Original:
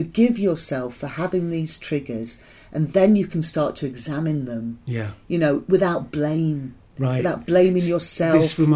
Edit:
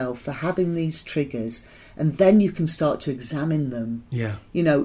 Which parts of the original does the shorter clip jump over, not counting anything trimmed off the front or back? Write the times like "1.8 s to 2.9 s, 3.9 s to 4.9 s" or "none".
none